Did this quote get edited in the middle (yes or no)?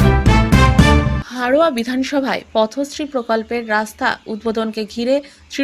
yes